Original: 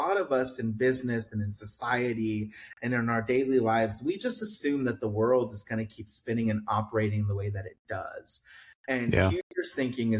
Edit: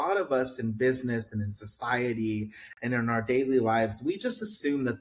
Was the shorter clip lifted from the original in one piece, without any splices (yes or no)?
yes